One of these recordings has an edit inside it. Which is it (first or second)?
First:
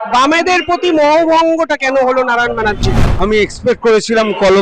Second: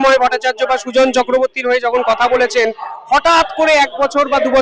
first